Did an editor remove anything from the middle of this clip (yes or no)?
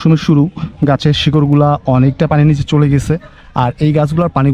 no